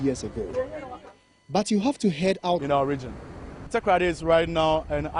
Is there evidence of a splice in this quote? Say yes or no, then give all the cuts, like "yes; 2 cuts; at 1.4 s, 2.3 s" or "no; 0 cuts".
no; 0 cuts